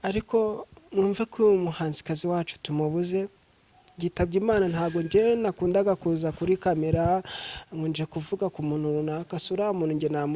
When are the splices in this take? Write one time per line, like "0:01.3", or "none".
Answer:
none

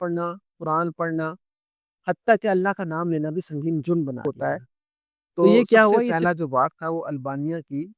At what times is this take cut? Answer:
0:06.1

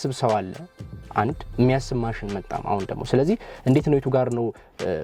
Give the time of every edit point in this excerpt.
none

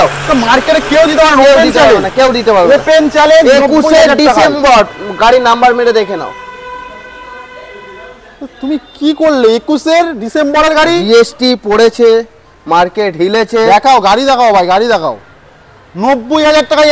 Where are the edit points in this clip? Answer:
none

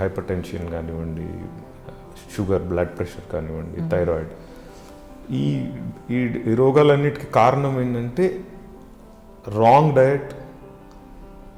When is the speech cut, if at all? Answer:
none

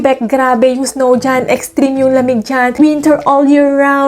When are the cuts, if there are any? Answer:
0:02.8

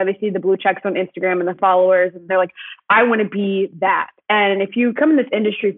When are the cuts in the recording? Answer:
0:02.2
0:04.6

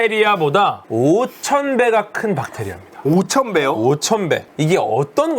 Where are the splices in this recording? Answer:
0:04.5

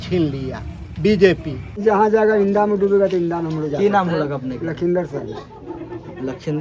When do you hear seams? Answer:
0:01.7

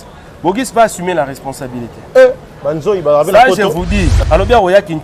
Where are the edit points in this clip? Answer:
0:04.1

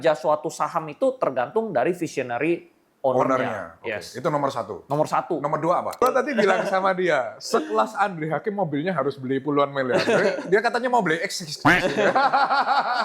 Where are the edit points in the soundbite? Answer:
0:06.0

